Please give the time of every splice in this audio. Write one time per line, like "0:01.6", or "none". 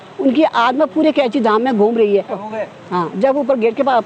0:02.3